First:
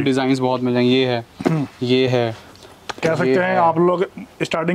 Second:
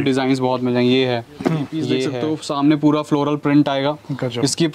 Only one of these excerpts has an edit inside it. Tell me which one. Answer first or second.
second